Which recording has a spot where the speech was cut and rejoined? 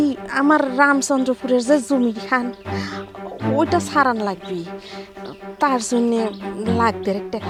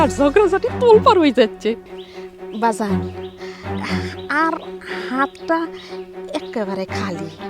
second; 1 cut; at 1.9 s

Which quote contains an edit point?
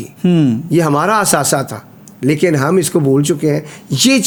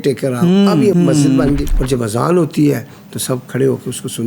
second; 2 cuts; at 0.9 s, 1.7 s

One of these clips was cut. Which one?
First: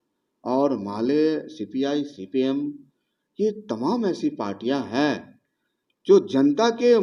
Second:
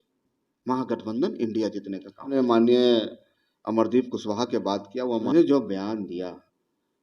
second; 2 cuts; at 2.3 s, 5.3 s

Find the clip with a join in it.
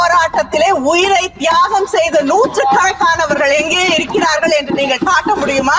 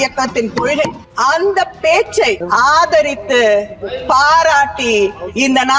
second; 2 cuts; at 1.0 s, 2.4 s

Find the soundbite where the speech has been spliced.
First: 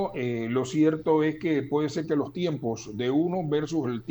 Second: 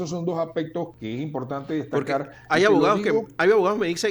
second; 1 cut; at 0.9 s

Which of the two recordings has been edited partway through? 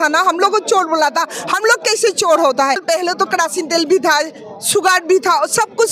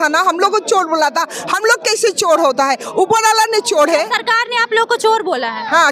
first; 1 cut; at 2.8 s

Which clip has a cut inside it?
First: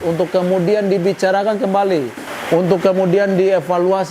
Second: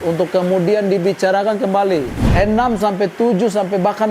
second; 1 cut; at 2.3 s

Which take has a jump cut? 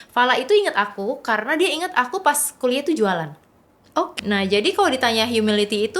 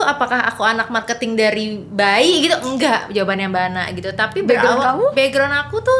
first; 1 cut; at 4.1 s

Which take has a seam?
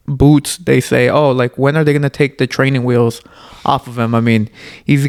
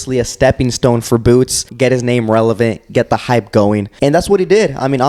second; 2 cuts; at 1.7 s, 3.9 s

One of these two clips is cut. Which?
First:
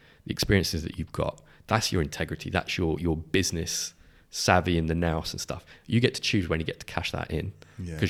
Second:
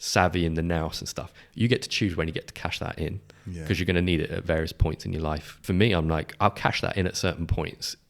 second; 1 cut; at 5.5 s

